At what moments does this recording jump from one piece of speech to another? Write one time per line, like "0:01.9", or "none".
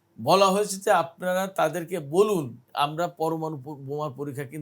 0:02.7